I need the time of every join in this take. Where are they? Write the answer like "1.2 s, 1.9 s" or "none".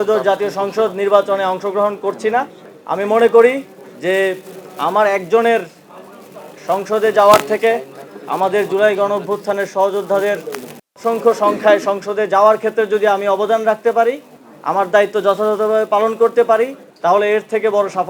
16.8 s